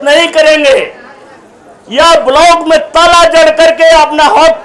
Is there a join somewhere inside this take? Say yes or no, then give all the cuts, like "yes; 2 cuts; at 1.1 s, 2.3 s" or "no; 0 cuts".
no; 0 cuts